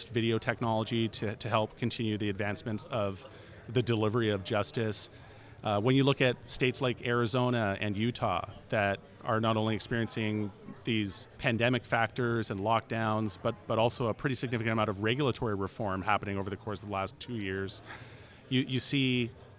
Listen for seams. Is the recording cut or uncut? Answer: uncut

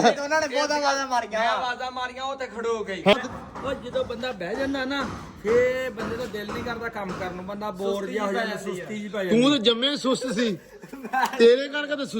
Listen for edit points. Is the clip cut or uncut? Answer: cut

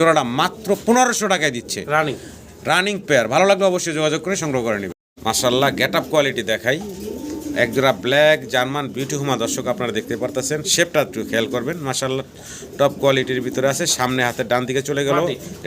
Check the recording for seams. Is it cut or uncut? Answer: uncut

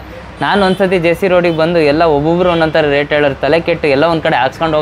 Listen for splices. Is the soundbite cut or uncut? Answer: uncut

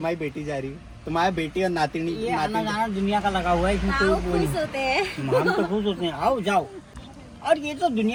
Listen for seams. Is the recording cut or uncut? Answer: uncut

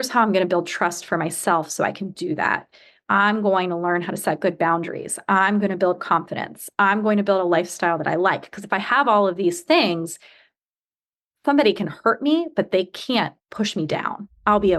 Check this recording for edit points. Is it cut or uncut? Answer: cut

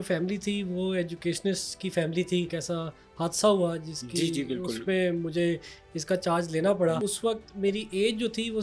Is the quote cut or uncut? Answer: cut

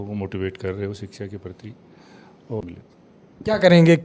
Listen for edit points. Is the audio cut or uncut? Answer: cut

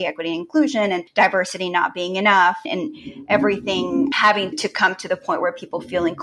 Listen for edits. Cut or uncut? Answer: cut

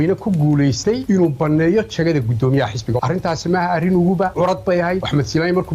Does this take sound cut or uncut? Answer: cut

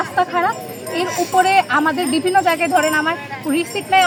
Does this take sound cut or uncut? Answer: uncut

